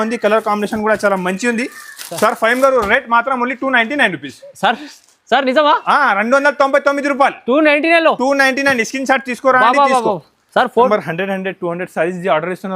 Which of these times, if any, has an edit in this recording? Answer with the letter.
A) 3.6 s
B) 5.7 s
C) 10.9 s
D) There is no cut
C